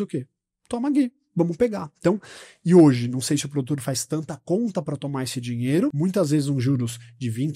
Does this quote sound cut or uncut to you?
cut